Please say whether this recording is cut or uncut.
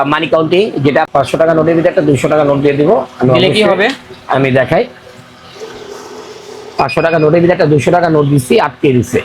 cut